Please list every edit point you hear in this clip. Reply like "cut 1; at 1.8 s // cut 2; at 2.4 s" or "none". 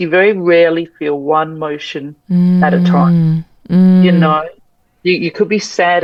none